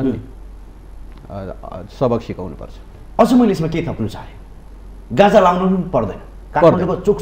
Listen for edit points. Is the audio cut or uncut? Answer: uncut